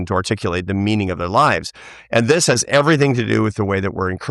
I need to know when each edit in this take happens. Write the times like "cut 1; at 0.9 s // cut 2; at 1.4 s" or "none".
none